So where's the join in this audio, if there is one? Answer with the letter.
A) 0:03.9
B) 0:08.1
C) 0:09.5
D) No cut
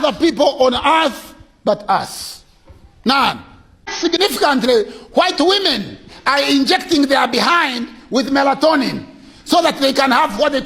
A